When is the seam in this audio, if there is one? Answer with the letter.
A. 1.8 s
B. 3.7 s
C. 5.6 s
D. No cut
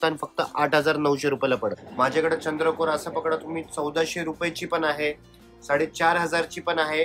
A